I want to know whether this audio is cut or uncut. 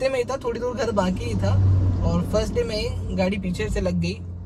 uncut